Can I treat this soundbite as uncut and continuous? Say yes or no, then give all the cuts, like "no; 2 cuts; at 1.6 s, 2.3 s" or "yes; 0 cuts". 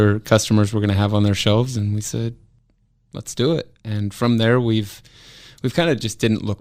yes; 0 cuts